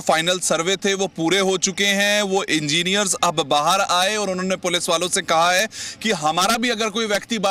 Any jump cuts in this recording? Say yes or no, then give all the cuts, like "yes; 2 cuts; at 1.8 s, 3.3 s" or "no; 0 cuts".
no; 0 cuts